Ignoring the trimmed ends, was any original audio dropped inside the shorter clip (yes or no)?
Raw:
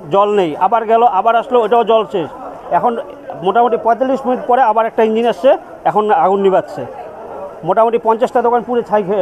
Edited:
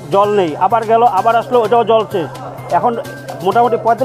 no